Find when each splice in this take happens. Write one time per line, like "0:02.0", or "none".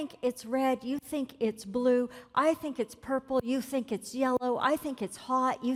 none